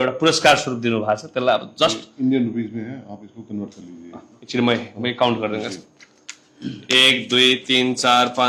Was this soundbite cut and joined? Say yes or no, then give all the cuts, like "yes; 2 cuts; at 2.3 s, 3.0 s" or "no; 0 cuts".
no; 0 cuts